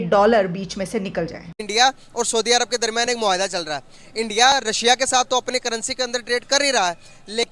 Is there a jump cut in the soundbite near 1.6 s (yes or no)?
yes